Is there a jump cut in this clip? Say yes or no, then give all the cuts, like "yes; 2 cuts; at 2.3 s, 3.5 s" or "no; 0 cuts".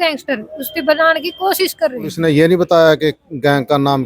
yes; 1 cut; at 2.1 s